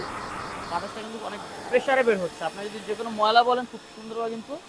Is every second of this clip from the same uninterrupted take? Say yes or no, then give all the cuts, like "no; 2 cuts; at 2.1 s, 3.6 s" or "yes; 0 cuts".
yes; 0 cuts